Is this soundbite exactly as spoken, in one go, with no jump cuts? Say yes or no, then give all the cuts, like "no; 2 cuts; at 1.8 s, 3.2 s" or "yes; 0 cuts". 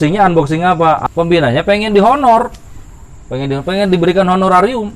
no; 1 cut; at 1.0 s